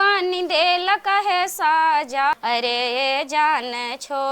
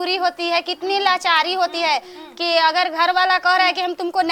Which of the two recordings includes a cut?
first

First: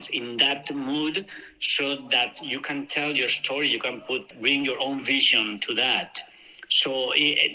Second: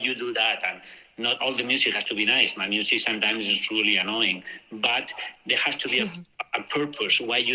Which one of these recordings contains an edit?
first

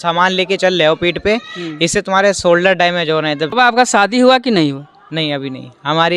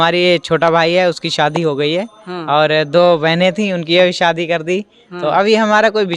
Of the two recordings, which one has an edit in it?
first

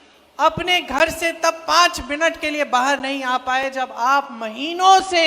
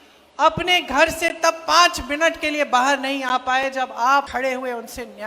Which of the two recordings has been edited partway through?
second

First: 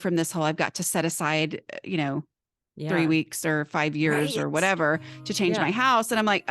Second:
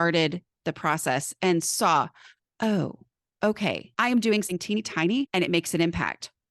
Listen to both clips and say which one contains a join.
second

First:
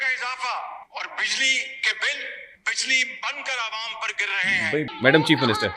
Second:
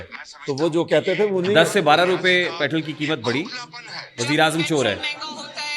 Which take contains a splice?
first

